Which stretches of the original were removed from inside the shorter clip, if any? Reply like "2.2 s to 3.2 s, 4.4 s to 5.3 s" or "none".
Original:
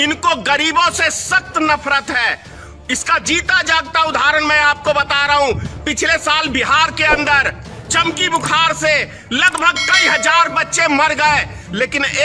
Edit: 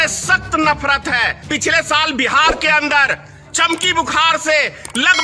2.4 s to 5.7 s